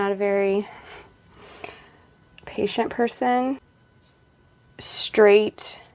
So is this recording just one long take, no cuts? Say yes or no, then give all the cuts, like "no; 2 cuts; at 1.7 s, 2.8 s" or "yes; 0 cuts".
no; 1 cut; at 3.8 s